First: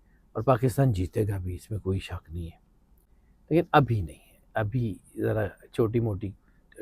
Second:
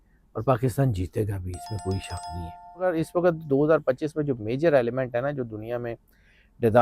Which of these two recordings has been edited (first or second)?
second